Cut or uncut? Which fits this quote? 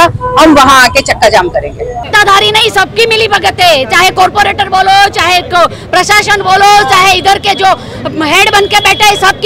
cut